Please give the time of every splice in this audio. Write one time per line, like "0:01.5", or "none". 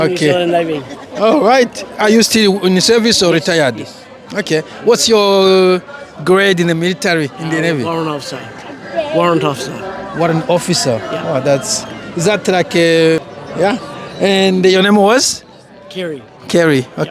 0:13.2